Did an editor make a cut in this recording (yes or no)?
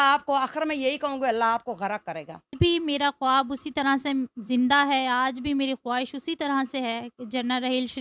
yes